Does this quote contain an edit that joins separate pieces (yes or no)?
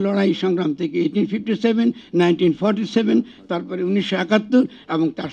no